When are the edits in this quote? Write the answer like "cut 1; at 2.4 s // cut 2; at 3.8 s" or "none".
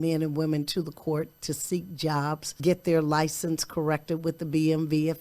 cut 1; at 2.5 s